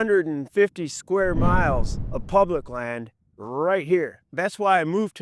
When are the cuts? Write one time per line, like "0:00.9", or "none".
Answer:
0:04.3